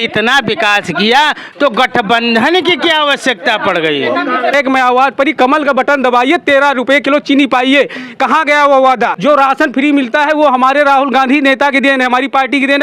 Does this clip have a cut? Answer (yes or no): yes